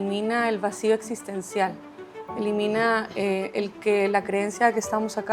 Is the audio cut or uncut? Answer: uncut